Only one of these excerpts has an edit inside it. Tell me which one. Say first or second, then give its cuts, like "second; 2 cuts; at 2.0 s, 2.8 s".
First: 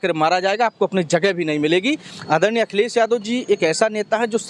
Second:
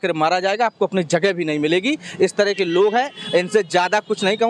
first; 1 cut; at 2.1 s